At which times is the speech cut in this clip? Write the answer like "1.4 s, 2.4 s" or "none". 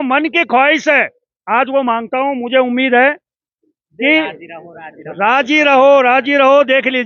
none